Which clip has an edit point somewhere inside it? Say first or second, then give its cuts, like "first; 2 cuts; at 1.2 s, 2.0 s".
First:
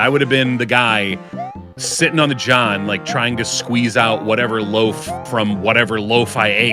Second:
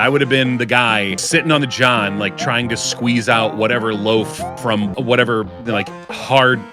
second; 2 cuts; at 1.2 s, 4.9 s